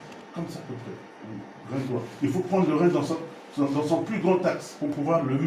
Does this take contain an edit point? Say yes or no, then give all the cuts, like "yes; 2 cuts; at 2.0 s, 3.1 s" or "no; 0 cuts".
no; 0 cuts